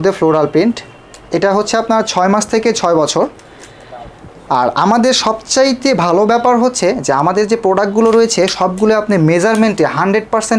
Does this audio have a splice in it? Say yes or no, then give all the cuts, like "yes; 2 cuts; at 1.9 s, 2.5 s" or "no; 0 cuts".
no; 0 cuts